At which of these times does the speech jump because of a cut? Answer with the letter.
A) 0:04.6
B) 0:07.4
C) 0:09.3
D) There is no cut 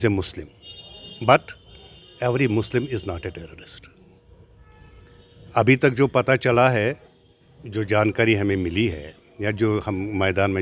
D